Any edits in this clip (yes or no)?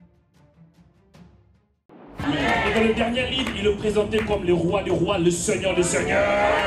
yes